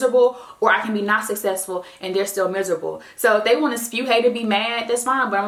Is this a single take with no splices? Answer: yes; 0 cuts

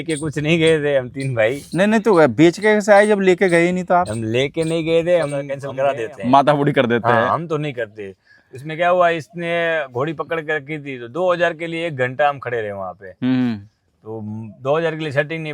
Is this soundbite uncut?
no; 1 cut; at 5.6 s

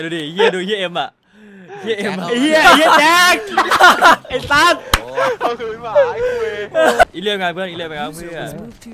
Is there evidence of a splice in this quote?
yes; 1 cut; at 7.0 s

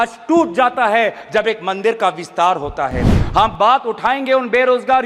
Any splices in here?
no; 0 cuts

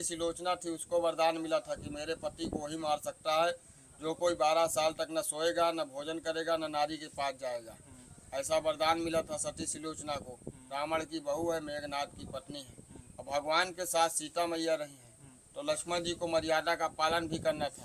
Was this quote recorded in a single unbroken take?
yes; 0 cuts

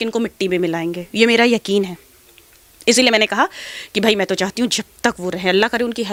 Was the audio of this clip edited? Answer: no; 0 cuts

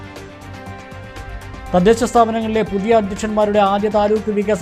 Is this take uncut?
yes; 0 cuts

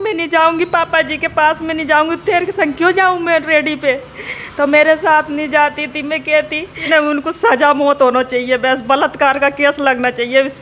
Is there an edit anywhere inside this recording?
yes; 1 cut; at 6.8 s

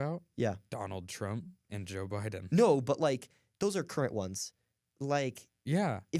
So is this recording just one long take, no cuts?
yes; 0 cuts

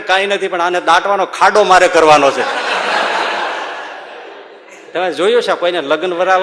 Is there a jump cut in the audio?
yes; 1 cut; at 4.7 s

